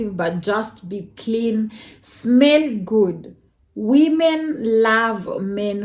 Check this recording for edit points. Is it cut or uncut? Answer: uncut